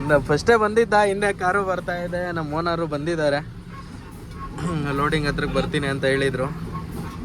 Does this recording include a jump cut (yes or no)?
no